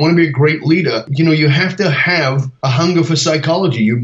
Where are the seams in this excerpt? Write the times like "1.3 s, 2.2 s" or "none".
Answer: 1.1 s, 2.5 s